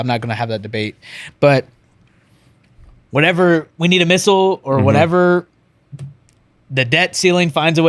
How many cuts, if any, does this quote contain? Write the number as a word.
one